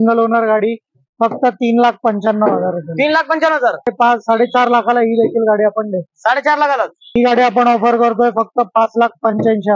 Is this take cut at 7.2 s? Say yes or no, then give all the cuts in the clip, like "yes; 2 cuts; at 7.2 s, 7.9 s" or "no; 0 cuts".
yes; 2 cuts; at 3.9 s, 7.2 s